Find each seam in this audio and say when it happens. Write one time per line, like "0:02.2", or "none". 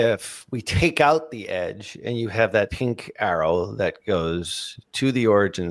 0:02.7